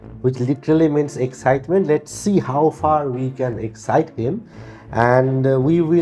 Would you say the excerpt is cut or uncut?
uncut